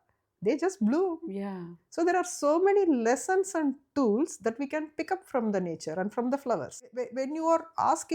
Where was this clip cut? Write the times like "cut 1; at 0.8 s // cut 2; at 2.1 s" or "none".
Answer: cut 1; at 7.0 s